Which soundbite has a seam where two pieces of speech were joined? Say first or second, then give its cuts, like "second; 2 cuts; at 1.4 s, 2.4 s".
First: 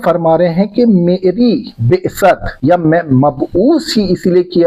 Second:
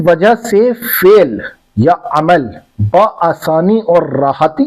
first; 1 cut; at 2.5 s